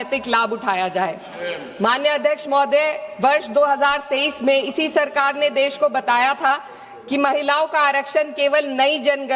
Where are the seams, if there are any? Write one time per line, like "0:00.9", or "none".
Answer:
none